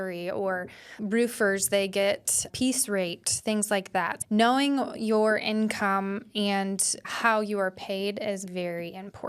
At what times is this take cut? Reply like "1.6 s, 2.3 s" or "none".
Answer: 1.0 s, 2.5 s, 4.2 s, 7.1 s, 8.5 s